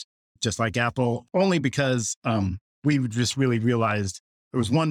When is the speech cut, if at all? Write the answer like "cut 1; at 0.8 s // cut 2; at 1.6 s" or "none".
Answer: none